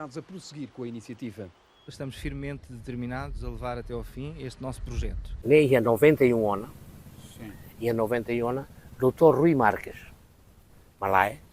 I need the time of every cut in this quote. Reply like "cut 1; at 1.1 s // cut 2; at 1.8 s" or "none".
cut 1; at 5.3 s